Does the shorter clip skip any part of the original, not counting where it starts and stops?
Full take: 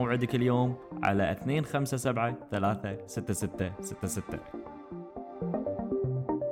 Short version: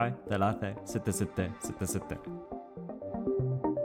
yes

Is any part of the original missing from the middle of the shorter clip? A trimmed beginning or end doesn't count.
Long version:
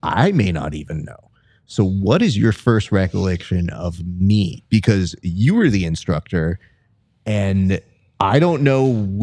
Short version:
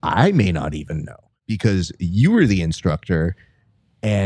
yes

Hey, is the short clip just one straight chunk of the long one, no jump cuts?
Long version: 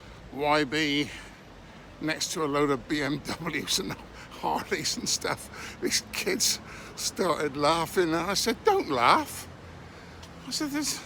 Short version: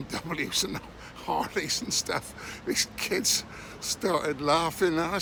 yes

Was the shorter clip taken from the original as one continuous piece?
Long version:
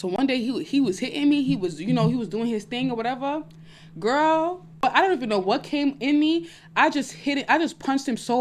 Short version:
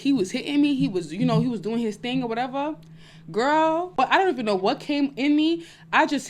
no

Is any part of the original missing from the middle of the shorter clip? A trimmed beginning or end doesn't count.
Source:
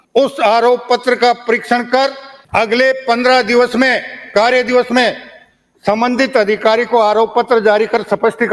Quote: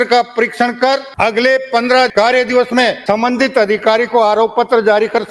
yes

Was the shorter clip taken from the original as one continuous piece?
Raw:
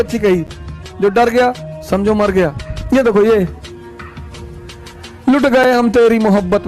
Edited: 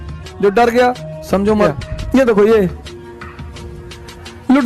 no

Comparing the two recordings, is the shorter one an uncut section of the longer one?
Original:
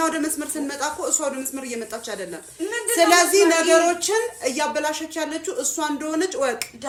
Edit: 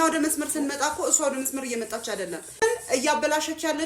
no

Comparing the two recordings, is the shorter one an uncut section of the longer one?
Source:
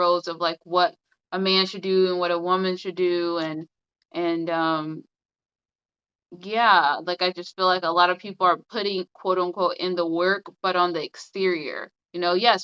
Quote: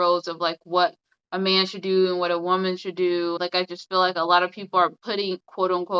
no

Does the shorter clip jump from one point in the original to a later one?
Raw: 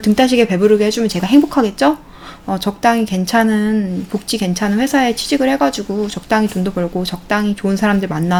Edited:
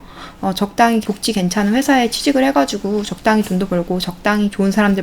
yes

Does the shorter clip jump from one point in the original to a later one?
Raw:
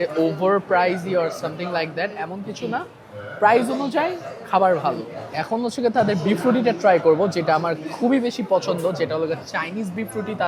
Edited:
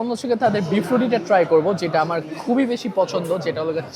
no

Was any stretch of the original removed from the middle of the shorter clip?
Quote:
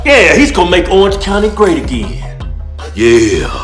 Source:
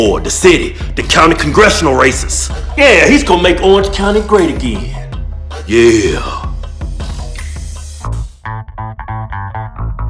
no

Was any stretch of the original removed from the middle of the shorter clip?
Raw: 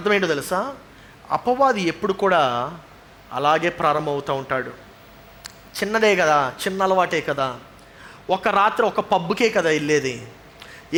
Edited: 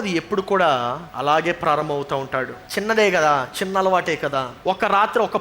yes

